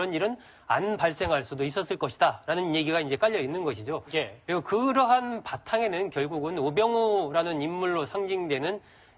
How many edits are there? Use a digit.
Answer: 1